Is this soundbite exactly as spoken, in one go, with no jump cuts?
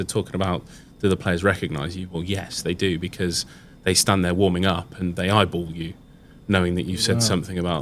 yes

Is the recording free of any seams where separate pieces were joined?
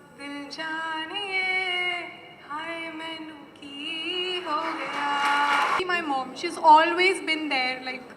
no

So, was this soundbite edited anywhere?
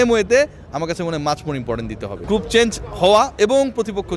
yes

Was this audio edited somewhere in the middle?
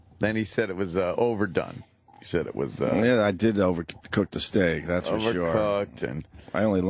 no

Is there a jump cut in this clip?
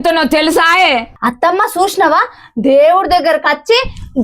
yes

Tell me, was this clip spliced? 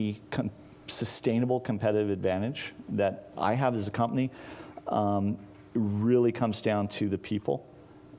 no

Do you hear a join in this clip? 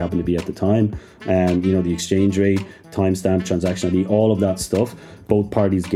no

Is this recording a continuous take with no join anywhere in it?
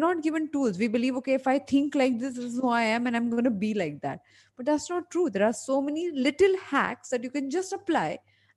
yes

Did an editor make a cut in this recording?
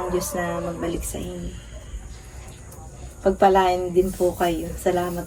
no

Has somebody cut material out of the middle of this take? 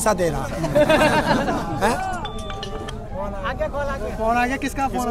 no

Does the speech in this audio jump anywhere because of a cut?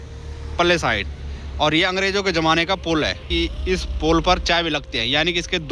yes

